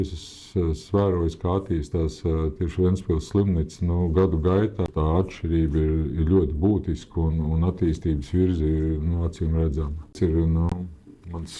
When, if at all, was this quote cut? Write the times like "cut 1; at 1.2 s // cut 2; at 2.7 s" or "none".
cut 1; at 4.9 s // cut 2; at 10.1 s

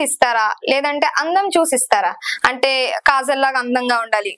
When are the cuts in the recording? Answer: none

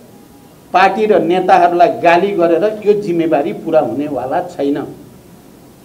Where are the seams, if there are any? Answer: none

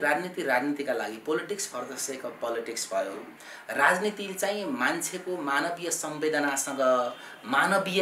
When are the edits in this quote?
none

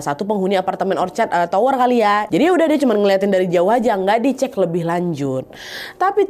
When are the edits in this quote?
cut 1; at 2.3 s

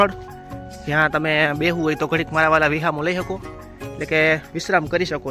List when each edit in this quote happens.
none

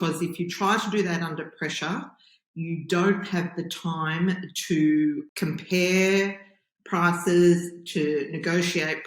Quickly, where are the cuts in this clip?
cut 1; at 5.3 s

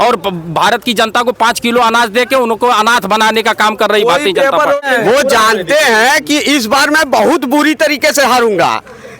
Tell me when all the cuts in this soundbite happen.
cut 1; at 4.8 s

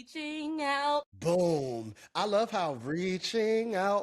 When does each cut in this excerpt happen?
cut 1; at 1.1 s

